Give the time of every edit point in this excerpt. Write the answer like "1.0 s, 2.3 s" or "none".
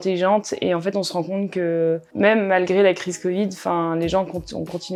none